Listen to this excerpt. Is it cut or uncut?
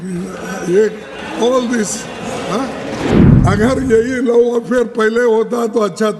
cut